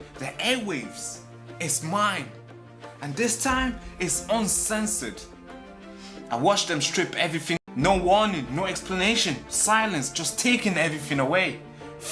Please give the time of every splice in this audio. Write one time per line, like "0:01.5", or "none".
0:07.6